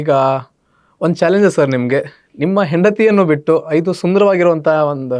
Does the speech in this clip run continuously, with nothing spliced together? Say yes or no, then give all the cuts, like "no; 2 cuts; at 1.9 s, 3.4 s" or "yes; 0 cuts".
yes; 0 cuts